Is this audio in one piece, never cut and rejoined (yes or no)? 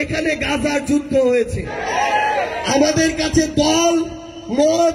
no